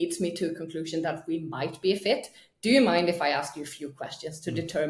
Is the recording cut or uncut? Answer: uncut